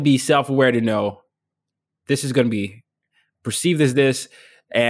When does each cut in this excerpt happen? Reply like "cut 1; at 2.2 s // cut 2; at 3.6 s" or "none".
cut 1; at 3.2 s

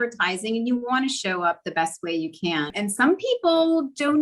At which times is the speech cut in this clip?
cut 1; at 2.7 s

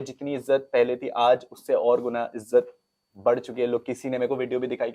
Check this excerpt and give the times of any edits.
none

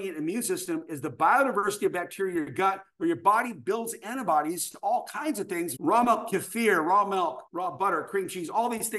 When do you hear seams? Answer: cut 1; at 5.7 s // cut 2; at 7.4 s

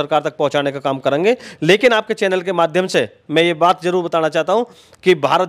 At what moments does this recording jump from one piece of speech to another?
none

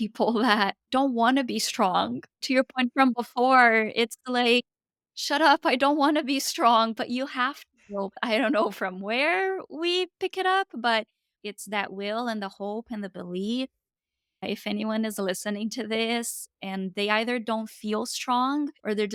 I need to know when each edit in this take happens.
none

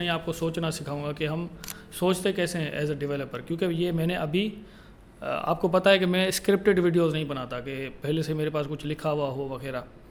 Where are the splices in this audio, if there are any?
none

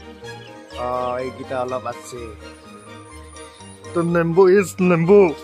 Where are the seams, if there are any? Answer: none

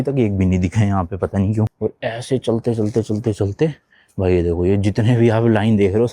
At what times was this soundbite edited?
cut 1; at 1.7 s

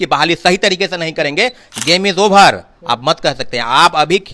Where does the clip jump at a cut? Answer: cut 1; at 1.6 s

